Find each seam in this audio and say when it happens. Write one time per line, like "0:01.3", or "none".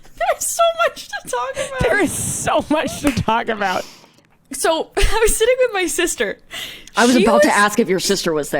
0:04.2